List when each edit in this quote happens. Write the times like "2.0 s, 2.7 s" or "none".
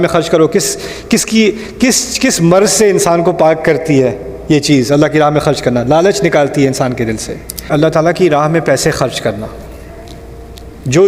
7.7 s